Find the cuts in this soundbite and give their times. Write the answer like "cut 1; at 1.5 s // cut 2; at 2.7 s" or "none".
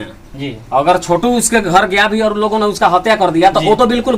none